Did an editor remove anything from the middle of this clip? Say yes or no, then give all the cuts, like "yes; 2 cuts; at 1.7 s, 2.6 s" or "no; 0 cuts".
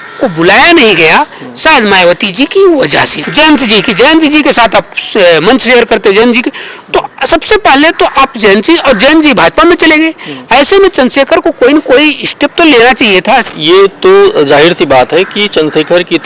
yes; 2 cuts; at 3.2 s, 13.5 s